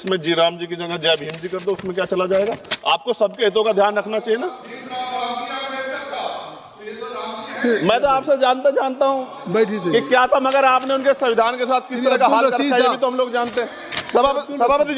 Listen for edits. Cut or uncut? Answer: uncut